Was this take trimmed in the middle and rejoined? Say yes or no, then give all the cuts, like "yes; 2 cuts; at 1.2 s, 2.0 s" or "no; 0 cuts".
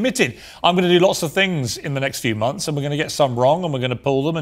no; 0 cuts